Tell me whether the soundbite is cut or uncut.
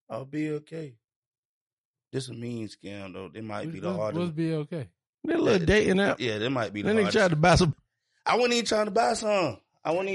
cut